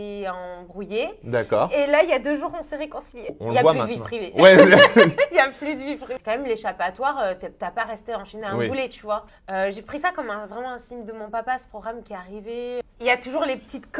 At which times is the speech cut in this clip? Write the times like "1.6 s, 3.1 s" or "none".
3.3 s, 6.1 s, 9.3 s, 12.8 s